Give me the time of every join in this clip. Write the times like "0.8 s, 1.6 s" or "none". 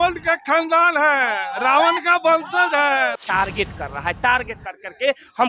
3.2 s